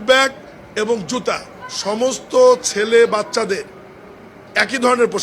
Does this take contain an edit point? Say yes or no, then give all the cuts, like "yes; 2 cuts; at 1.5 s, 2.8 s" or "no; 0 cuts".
yes; 1 cut; at 1.5 s